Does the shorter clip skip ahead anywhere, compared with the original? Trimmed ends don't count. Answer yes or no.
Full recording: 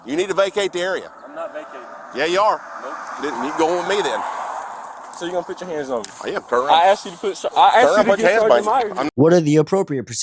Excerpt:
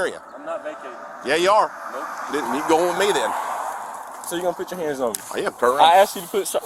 no